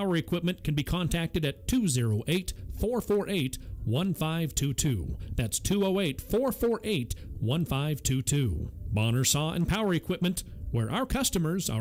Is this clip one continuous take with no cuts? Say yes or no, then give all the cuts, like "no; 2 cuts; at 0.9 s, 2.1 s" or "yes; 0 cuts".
yes; 0 cuts